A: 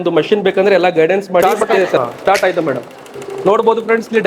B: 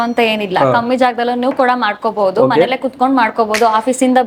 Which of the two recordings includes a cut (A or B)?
A